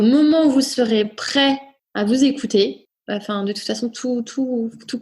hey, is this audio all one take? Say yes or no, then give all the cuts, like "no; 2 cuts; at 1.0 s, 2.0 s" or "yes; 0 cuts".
no; 2 cuts; at 1.8 s, 2.9 s